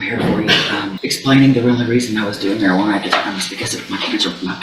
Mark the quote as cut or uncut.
cut